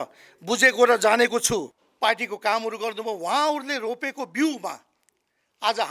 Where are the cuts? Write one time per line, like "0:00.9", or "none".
0:01.8